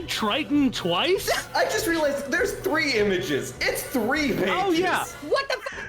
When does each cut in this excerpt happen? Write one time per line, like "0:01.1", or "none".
0:01.4
0:05.1